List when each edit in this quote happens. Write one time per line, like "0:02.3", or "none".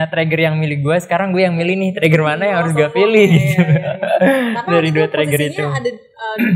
none